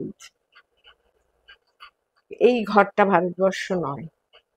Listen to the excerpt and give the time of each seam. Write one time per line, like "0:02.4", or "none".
none